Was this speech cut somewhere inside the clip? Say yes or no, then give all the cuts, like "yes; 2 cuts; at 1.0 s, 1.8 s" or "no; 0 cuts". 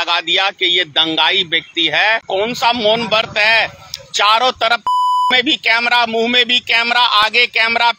yes; 1 cut; at 2.2 s